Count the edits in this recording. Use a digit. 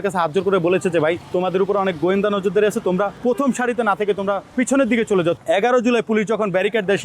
4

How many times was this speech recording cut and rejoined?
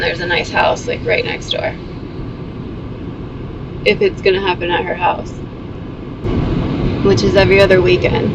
1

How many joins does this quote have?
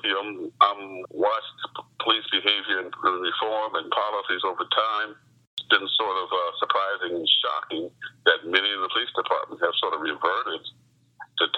2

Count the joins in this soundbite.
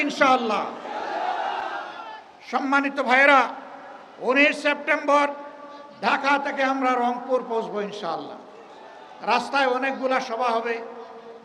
0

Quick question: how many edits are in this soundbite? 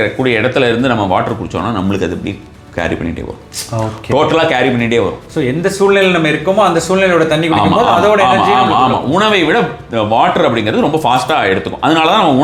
0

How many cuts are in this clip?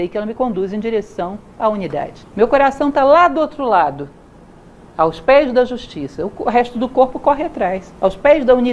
1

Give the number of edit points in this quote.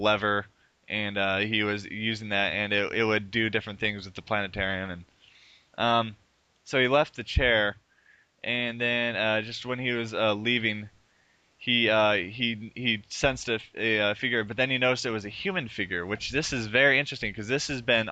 0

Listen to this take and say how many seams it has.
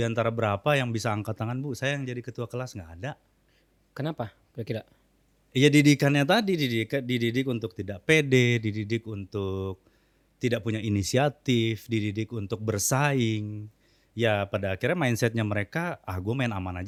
0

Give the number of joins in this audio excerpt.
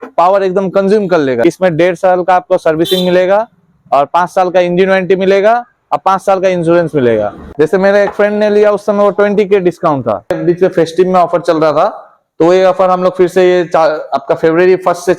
3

